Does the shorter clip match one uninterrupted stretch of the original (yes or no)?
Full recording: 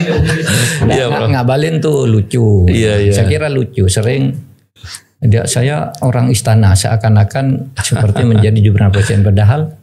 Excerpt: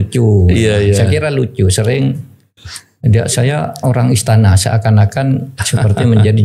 yes